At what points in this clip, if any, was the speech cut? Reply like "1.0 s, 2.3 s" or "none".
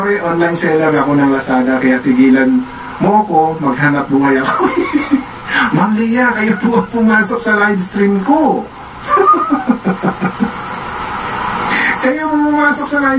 none